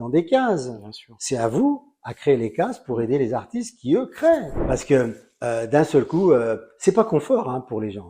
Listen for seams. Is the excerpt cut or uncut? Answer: cut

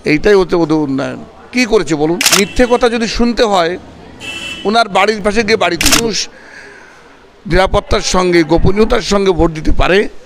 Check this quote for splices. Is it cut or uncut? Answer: cut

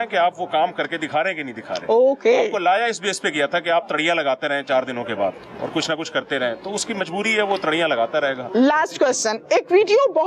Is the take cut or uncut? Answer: uncut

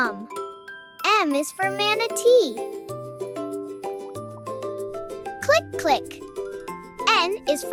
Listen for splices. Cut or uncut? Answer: uncut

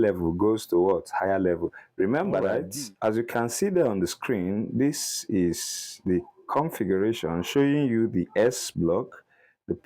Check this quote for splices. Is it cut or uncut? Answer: cut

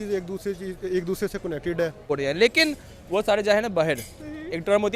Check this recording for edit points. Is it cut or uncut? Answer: cut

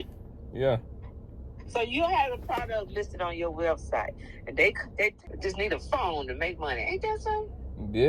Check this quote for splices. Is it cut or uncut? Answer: cut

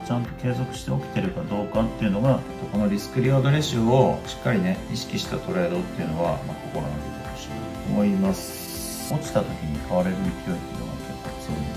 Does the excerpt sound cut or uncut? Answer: cut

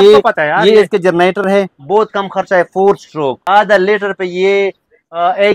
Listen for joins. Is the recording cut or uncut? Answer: cut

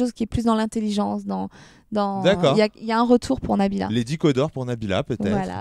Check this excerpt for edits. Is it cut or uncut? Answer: uncut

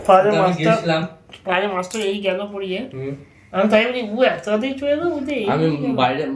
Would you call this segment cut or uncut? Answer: uncut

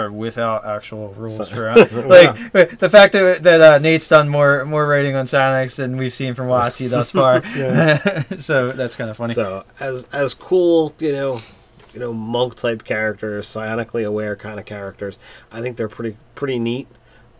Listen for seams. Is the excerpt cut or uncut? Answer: cut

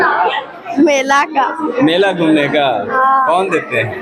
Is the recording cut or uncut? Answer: uncut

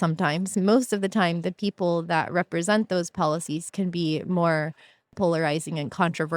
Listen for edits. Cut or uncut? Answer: cut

